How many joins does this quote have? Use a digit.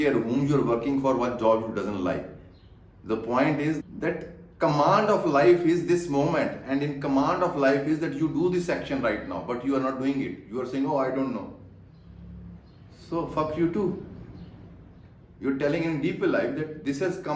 1